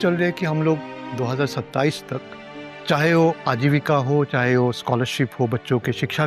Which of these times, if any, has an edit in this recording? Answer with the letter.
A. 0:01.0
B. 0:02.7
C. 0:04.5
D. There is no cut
B